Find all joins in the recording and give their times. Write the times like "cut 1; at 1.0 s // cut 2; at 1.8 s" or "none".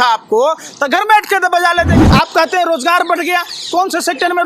cut 1; at 2.0 s